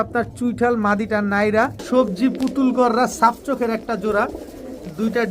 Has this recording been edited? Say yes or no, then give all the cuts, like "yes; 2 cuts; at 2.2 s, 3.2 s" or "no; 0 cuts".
yes; 1 cut; at 1.8 s